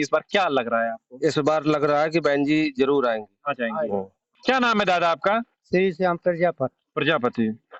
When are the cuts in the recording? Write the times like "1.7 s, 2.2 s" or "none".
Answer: none

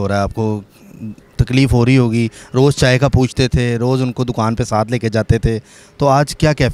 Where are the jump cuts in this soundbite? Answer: none

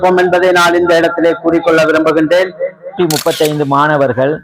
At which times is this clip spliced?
2.9 s

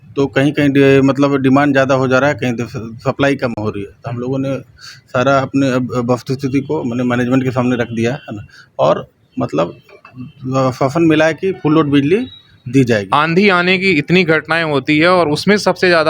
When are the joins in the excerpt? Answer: 13.1 s

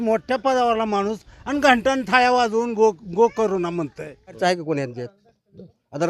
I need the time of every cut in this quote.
4.4 s

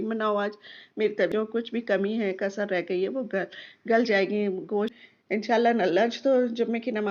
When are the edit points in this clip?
1.3 s, 4.9 s

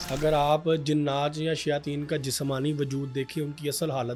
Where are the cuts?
none

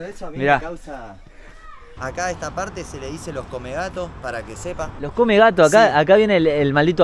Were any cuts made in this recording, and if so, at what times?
1.8 s

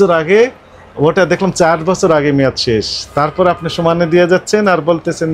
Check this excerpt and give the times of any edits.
none

